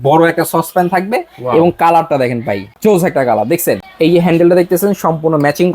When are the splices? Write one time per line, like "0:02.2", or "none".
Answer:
0:02.7
0:03.9